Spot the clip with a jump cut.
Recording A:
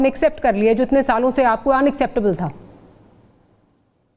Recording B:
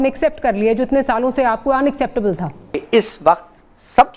B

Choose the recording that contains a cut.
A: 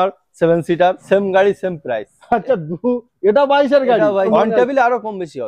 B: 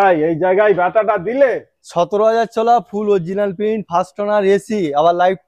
A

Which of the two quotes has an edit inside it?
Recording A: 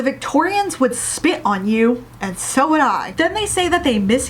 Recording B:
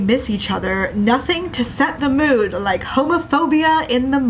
A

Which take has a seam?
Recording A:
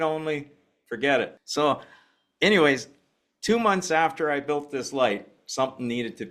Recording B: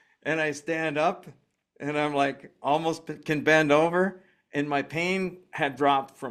A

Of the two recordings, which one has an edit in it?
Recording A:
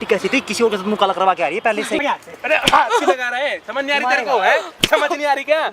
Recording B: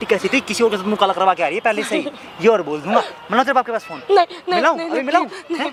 A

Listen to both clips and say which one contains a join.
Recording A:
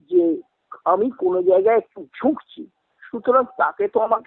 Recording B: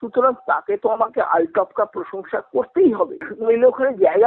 B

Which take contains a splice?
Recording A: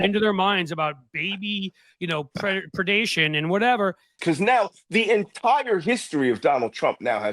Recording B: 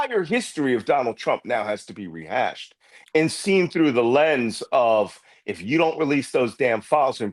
A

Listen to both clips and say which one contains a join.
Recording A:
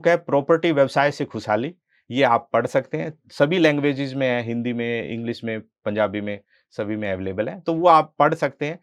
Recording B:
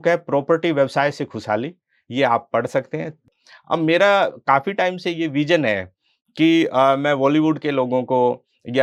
B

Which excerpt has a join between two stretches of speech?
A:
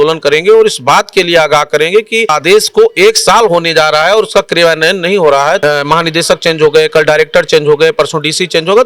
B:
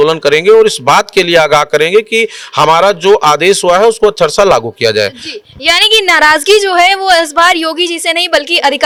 A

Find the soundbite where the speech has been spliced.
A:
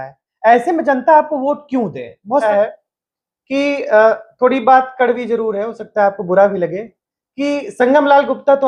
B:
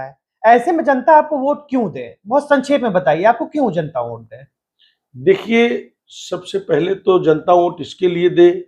A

